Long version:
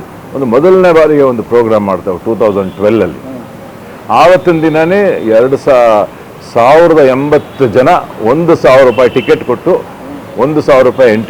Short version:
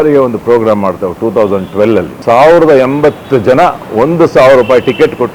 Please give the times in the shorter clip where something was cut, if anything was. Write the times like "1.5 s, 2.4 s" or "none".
2.1 s